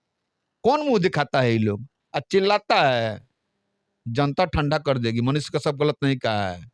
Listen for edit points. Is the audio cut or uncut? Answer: uncut